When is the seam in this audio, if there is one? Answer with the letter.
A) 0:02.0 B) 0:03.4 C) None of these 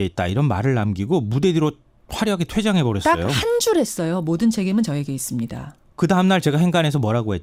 C